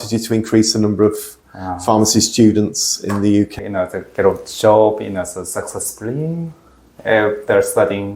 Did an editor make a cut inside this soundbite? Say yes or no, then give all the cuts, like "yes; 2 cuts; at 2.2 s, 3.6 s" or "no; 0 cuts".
yes; 1 cut; at 3.5 s